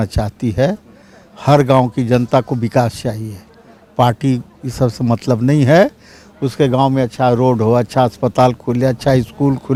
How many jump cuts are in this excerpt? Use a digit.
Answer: 0